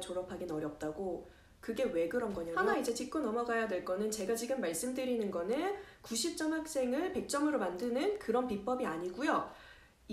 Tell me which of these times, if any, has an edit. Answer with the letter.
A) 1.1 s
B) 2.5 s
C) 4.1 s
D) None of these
B